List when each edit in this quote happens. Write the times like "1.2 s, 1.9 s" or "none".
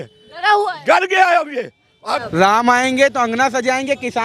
2.2 s